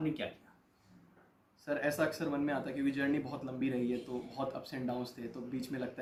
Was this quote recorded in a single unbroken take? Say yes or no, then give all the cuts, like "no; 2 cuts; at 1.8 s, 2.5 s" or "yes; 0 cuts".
yes; 0 cuts